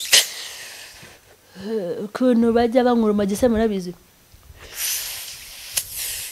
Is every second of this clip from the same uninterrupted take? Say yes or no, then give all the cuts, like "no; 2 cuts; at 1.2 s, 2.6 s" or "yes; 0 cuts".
yes; 0 cuts